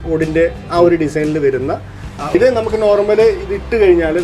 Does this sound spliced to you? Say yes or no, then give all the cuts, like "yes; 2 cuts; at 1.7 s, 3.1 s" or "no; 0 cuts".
yes; 1 cut; at 2.3 s